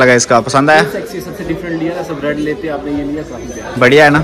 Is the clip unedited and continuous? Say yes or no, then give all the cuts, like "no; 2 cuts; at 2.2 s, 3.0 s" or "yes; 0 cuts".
yes; 0 cuts